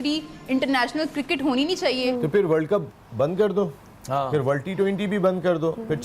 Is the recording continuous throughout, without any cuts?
no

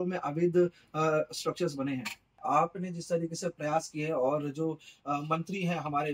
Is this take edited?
yes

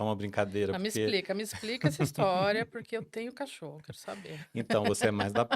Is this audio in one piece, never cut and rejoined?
yes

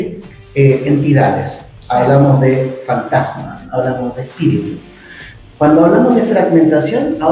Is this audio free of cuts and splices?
yes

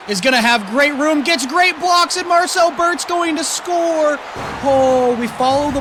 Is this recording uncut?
yes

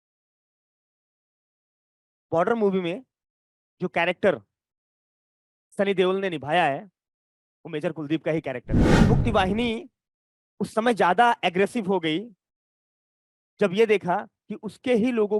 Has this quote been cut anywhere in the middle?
yes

